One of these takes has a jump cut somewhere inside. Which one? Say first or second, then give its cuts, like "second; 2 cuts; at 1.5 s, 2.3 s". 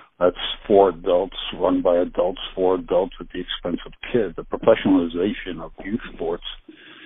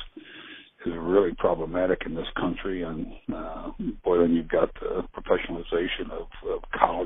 first; 1 cut; at 4.4 s